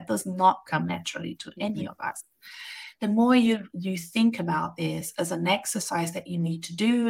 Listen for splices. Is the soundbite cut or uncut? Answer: uncut